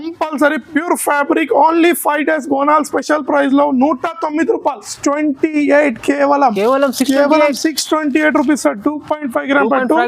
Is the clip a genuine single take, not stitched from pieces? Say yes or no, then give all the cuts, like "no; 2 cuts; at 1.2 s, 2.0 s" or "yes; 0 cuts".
no; 1 cut; at 4.9 s